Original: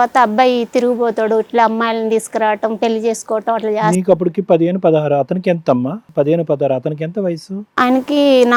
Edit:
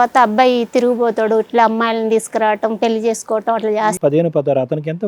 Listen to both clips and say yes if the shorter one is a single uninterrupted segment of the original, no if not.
no